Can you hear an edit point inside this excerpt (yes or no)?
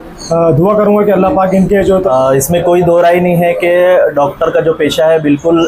yes